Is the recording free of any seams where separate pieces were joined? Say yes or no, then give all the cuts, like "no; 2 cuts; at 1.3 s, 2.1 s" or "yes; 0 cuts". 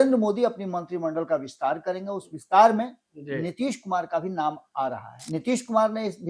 no; 1 cut; at 5.1 s